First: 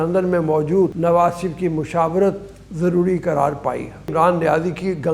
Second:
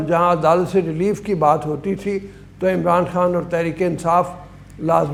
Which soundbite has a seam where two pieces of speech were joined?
first; 2 cuts; at 0.9 s, 4.1 s

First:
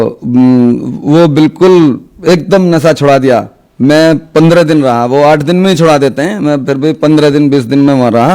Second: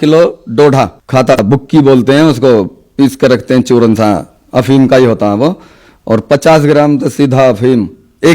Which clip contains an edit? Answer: second; 1 cut; at 1.4 s

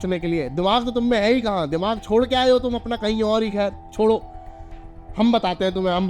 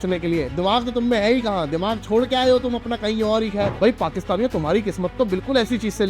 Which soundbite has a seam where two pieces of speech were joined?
second; 1 cut; at 3.8 s

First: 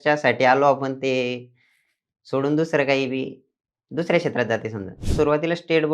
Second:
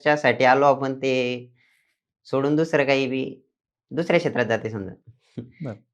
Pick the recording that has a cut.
first; 1 cut; at 5.0 s

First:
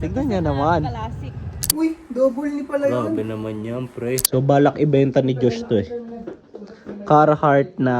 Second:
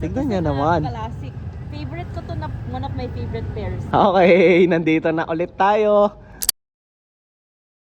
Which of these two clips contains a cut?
first; 2 cuts; at 1.7 s, 4.2 s

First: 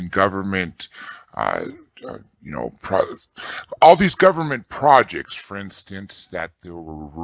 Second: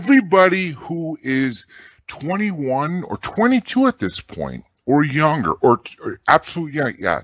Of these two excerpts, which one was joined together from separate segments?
first; 1 cut; at 4.6 s

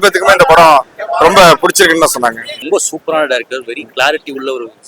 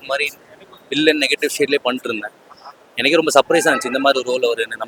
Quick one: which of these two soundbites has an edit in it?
first; 2 cuts; at 2.6 s, 3.9 s

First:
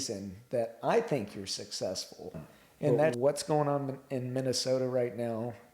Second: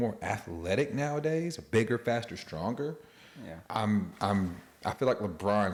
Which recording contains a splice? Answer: first; 1 cut; at 3.1 s

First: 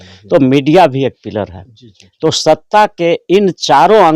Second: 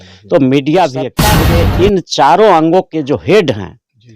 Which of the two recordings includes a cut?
second; 1 cut; at 1.4 s

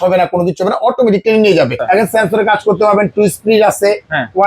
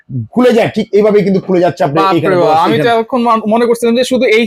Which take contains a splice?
first; 1 cut; at 1.8 s

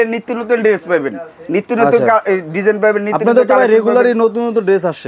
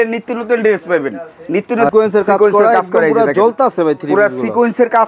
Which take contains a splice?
second; 1 cut; at 1.9 s

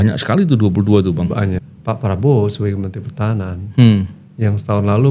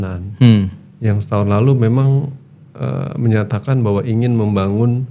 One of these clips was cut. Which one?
first; 1 cut; at 1.7 s

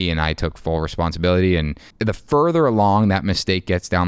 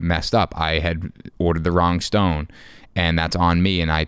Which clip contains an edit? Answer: first; 1 cut; at 1.9 s

